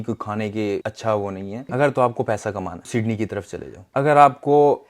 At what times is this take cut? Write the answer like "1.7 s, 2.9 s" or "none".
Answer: 0.8 s, 1.7 s, 2.9 s, 3.9 s